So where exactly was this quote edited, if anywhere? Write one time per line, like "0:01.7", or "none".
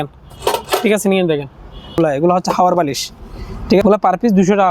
0:01.9
0:03.8